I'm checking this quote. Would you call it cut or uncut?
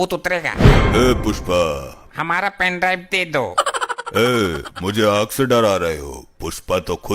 cut